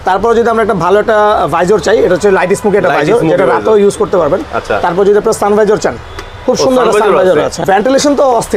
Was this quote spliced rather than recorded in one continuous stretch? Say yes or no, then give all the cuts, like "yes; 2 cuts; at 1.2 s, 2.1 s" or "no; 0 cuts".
yes; 1 cut; at 7.6 s